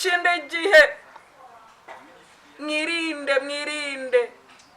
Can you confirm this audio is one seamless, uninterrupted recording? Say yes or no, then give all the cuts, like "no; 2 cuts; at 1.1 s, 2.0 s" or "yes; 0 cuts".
yes; 0 cuts